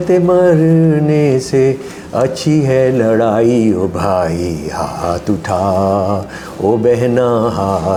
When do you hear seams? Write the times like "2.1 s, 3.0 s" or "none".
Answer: none